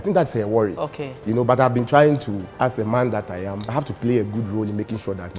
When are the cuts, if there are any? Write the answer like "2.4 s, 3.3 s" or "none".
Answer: 2.5 s, 3.6 s